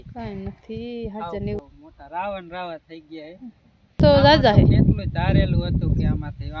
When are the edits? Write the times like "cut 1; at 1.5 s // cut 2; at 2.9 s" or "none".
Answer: cut 1; at 1.6 s // cut 2; at 4.0 s